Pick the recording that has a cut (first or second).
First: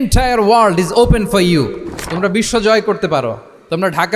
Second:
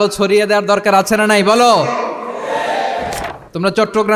second